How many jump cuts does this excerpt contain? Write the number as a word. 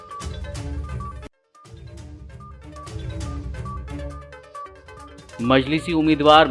one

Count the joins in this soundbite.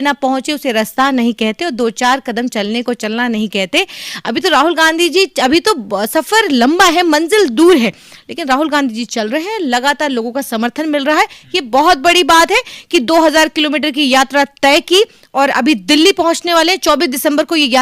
zero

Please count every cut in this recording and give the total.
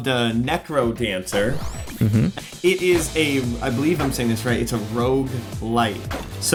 zero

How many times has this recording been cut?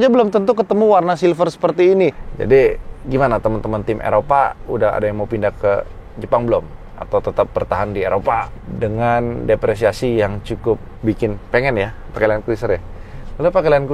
three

